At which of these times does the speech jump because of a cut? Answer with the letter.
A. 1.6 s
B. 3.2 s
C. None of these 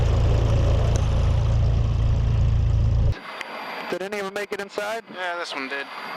B